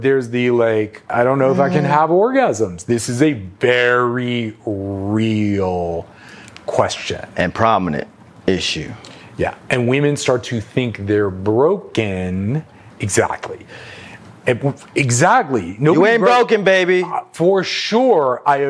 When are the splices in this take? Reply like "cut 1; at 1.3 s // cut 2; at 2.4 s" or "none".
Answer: cut 1; at 1.1 s